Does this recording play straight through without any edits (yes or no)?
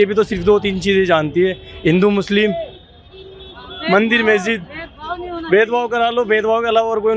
yes